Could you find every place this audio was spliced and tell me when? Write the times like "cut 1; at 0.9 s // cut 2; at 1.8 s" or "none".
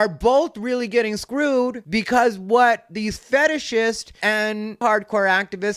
none